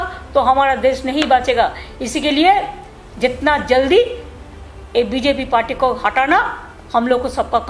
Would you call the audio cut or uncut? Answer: uncut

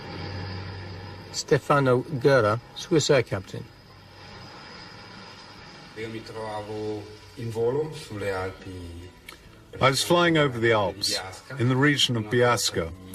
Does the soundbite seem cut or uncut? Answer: cut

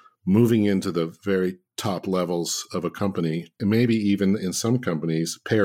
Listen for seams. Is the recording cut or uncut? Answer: cut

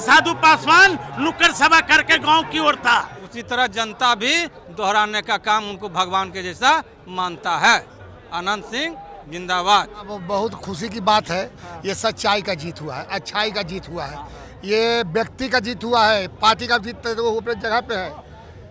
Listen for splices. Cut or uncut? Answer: cut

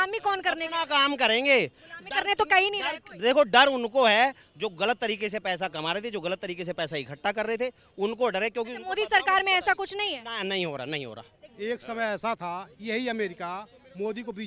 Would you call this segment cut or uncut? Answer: uncut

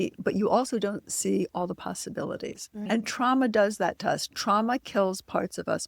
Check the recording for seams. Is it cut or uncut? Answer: cut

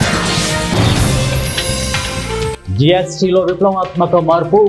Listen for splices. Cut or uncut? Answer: cut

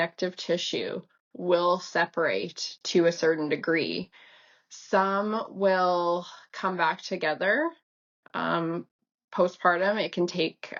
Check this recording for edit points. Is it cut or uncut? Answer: uncut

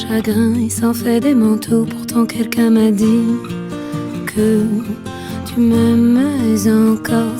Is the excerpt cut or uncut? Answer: uncut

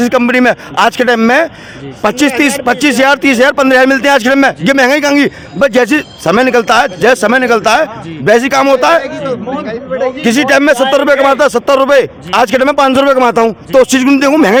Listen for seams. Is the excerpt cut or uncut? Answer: uncut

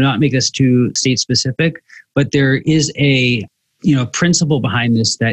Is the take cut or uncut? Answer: cut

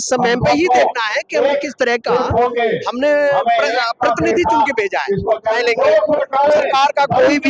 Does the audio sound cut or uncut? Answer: cut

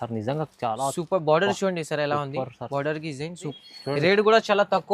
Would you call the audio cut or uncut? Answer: cut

